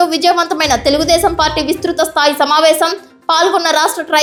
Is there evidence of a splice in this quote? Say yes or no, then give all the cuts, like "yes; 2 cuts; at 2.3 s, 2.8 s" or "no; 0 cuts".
no; 0 cuts